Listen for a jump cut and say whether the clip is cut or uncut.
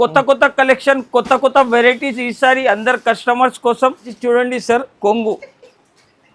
cut